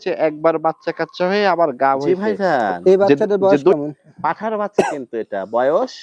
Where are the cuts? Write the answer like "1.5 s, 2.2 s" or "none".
2.0 s